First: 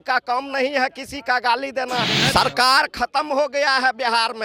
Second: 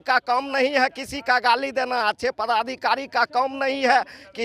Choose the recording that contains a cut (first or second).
first